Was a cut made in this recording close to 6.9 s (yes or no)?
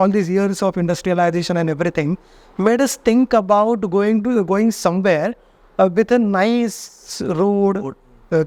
no